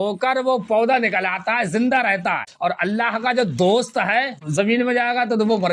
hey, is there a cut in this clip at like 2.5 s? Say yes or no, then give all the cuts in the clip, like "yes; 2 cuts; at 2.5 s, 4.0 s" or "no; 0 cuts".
yes; 1 cut; at 2.5 s